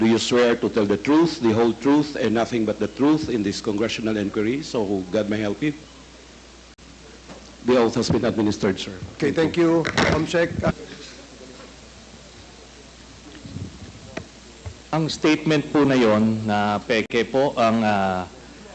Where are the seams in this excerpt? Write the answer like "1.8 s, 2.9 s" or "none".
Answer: 10.8 s